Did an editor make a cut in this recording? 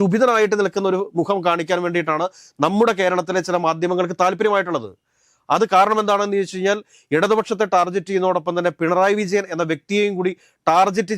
no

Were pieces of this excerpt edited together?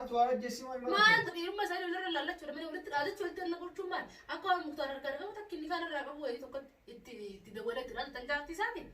yes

